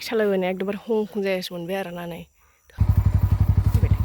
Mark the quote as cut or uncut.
cut